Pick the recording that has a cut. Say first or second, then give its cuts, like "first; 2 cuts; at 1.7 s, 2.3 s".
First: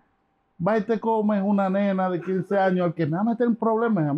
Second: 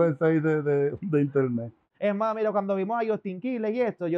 second; 1 cut; at 1.9 s